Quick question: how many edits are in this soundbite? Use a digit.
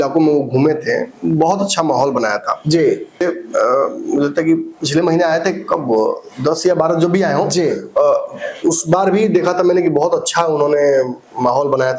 1